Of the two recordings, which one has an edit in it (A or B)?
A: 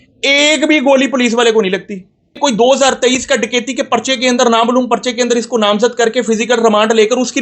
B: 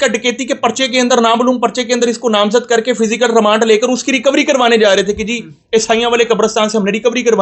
A